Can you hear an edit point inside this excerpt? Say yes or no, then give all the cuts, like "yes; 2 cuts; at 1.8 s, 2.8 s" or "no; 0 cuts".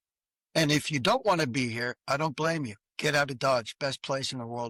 no; 0 cuts